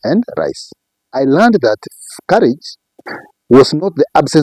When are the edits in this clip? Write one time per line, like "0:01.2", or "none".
0:01.0

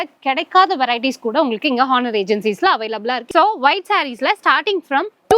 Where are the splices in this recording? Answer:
0:03.2

